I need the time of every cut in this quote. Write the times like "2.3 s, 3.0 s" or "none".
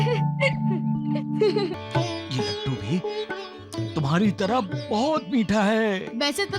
1.7 s